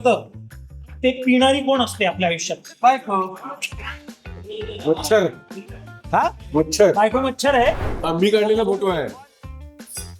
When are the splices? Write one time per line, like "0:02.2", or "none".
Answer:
0:07.8
0:09.2